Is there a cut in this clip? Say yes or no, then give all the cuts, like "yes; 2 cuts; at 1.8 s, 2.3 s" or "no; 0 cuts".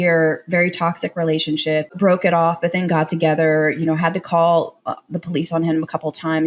yes; 1 cut; at 1.9 s